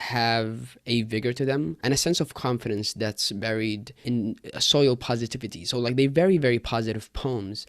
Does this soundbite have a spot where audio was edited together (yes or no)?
yes